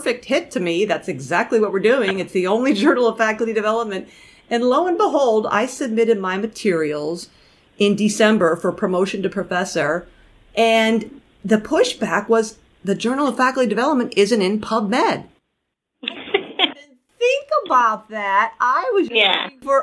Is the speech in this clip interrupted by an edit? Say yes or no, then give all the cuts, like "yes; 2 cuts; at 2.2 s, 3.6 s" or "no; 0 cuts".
no; 0 cuts